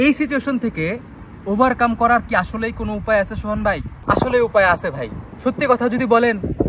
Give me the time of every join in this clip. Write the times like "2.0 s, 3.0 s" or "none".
none